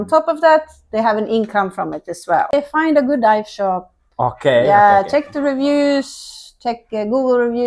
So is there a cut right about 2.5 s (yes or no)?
yes